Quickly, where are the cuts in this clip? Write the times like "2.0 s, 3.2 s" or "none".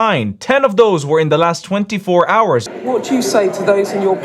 2.7 s